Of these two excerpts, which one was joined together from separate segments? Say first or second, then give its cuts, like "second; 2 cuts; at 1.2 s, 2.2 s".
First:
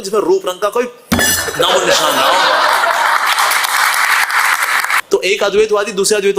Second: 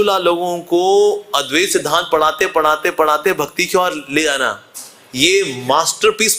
first; 1 cut; at 5.0 s